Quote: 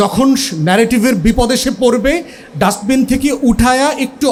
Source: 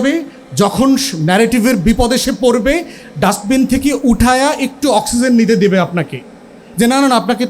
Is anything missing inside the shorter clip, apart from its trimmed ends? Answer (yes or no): no